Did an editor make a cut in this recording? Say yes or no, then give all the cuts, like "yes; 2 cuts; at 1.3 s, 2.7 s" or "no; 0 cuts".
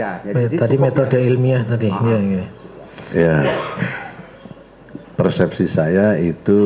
no; 0 cuts